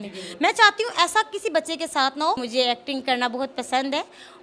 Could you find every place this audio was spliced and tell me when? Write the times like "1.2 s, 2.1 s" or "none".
2.5 s